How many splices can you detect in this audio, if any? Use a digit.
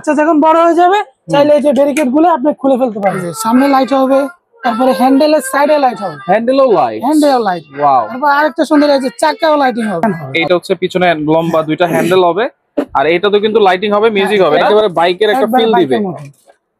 3